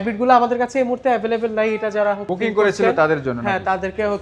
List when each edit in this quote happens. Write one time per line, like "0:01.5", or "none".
none